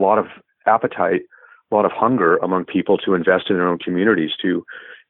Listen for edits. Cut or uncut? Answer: uncut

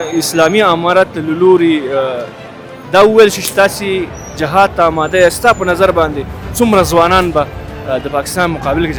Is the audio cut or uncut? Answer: uncut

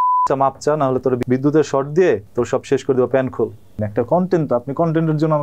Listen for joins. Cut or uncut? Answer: cut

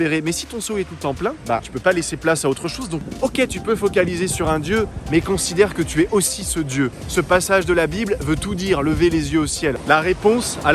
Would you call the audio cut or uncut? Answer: cut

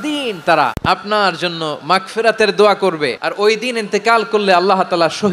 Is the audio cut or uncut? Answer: cut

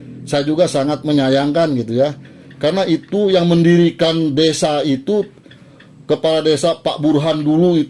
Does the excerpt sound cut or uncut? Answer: uncut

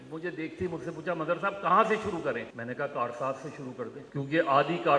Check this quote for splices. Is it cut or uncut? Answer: cut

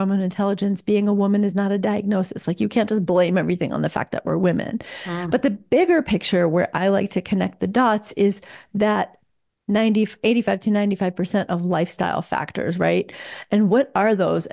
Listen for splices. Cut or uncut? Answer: uncut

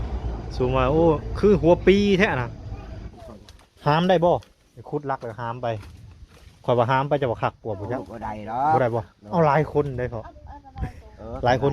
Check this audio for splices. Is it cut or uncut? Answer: cut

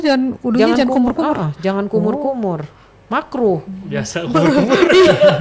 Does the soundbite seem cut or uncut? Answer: uncut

